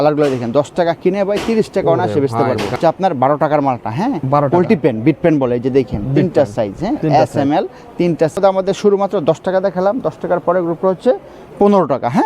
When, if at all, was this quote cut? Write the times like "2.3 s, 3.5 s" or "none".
2.8 s, 8.3 s